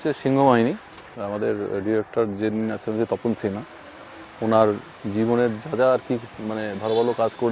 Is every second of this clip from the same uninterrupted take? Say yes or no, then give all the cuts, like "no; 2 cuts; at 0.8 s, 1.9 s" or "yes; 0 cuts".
no; 1 cut; at 1.0 s